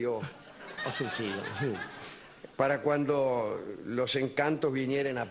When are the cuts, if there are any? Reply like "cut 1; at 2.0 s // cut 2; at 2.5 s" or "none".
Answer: none